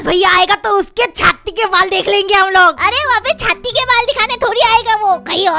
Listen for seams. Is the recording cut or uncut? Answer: uncut